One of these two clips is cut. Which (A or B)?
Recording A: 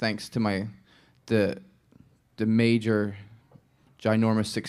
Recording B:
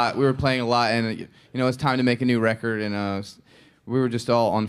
B